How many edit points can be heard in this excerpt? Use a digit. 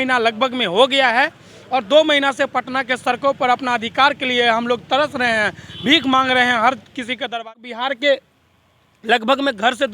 1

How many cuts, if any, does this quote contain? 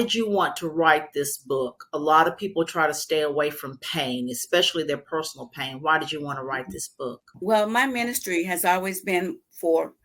1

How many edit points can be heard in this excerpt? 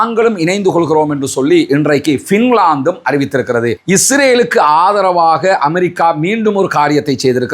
1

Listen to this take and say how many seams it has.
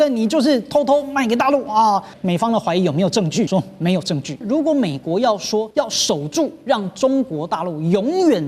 4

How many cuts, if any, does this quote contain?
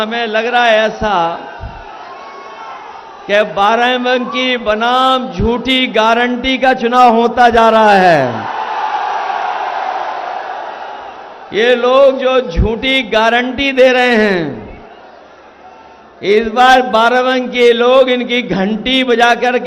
0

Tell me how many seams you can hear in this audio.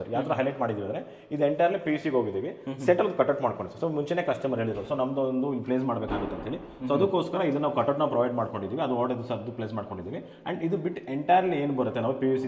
0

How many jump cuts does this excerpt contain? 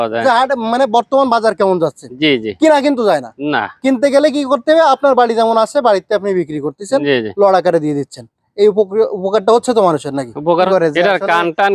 1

